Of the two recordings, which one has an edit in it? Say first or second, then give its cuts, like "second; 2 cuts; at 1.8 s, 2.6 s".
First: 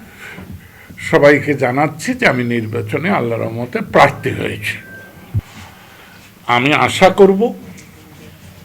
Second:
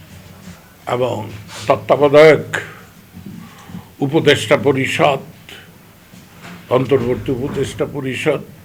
first; 1 cut; at 5.4 s